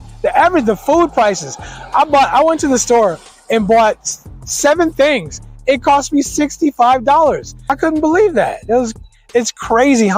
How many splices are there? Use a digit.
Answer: 1